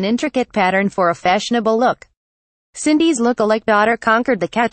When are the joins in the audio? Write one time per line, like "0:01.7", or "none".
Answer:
0:02.0